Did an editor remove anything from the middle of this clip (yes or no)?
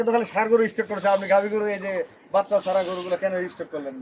no